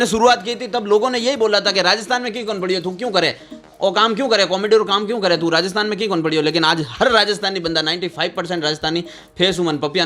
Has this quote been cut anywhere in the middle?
no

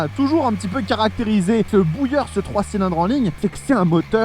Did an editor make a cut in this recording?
yes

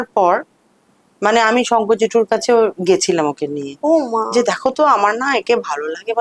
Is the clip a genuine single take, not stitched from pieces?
yes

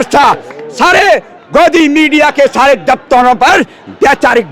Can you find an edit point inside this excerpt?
no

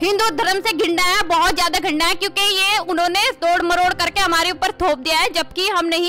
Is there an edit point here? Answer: no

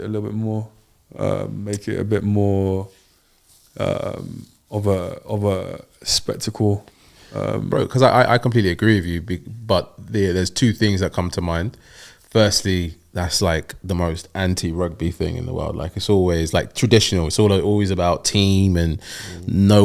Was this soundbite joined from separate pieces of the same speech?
no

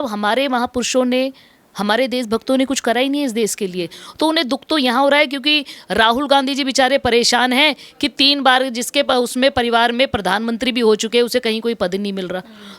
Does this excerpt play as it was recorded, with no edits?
yes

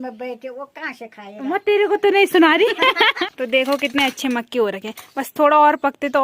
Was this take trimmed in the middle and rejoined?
yes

